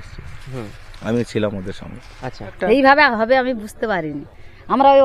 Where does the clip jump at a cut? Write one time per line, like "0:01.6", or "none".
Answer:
0:02.5